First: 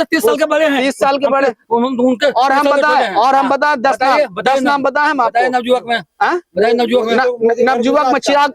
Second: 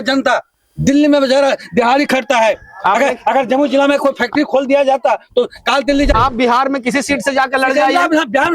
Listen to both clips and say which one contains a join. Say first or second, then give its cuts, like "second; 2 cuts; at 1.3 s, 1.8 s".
second; 1 cut; at 6.1 s